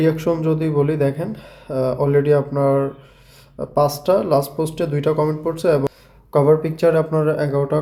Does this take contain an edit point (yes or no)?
no